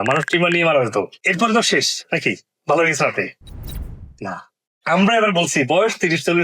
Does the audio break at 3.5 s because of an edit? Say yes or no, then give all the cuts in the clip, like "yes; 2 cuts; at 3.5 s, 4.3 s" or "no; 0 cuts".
no; 2 cuts; at 1.2 s, 4.8 s